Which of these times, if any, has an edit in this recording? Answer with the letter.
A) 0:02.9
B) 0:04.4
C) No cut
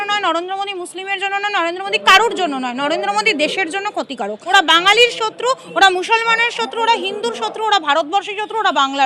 B